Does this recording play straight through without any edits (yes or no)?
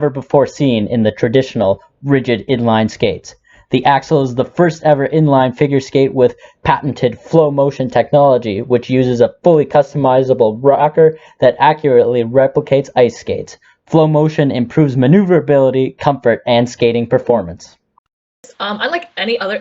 no